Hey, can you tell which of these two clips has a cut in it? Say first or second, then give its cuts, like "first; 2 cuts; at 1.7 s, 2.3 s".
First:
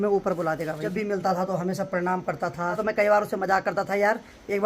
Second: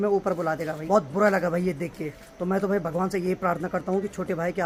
first; 2 cuts; at 0.8 s, 2.8 s